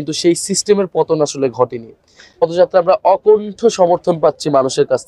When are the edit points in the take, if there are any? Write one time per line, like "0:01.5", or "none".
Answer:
0:02.4

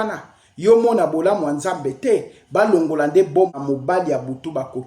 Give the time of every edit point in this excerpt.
0:03.5

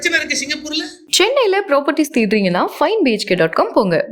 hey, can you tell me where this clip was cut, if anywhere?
0:01.0

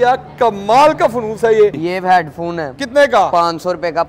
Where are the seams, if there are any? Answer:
0:01.8

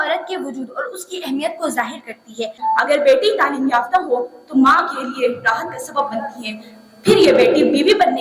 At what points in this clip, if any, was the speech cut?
0:02.5

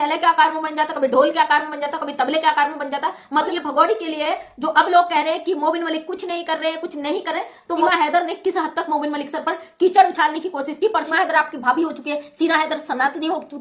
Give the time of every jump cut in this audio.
0:03.5
0:07.8
0:11.1

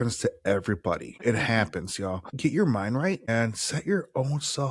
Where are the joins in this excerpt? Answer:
0:01.2
0:02.3
0:03.3

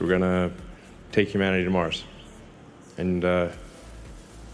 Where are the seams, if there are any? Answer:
none

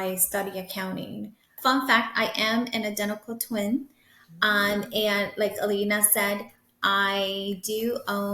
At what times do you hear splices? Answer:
0:01.5

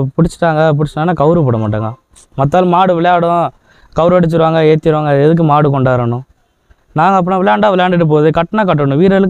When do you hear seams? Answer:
none

